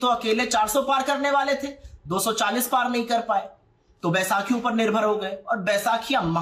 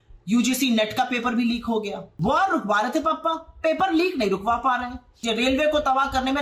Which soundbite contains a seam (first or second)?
second